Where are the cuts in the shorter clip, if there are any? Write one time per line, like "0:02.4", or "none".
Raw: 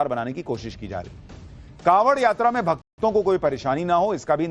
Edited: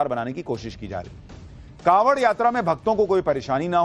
0:02.8

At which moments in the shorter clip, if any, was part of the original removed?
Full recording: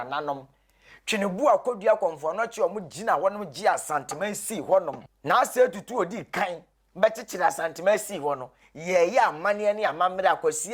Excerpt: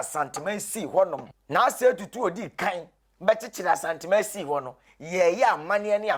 none

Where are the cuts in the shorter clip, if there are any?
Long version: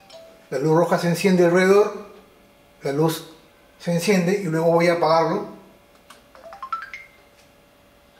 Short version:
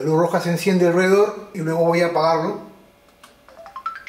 0:01.6

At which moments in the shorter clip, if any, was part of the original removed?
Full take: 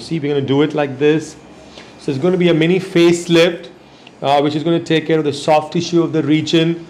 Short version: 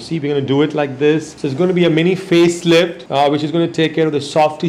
0:01.4
0:03.0

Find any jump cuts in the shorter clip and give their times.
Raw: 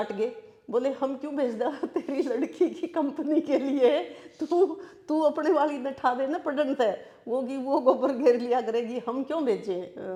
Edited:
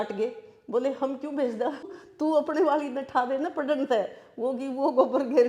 0:01.9

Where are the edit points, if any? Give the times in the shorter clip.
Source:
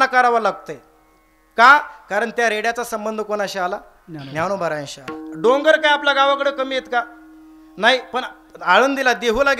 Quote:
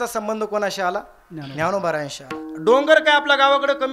none

